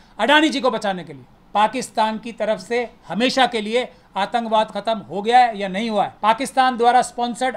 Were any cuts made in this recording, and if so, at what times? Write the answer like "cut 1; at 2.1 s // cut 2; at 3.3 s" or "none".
cut 1; at 1.3 s // cut 2; at 6.1 s